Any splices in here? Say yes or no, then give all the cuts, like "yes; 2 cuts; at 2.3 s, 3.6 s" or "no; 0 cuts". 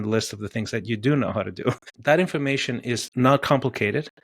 yes; 2 cuts; at 1.9 s, 3.1 s